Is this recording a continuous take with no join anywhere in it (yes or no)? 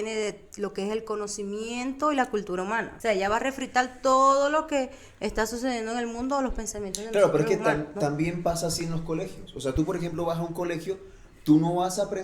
no